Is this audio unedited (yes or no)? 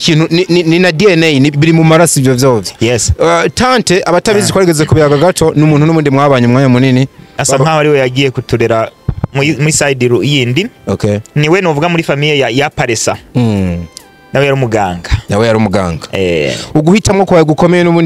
yes